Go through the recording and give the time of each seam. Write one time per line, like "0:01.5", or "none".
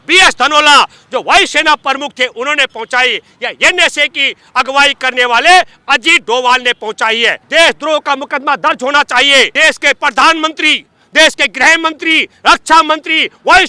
0:07.4
0:09.5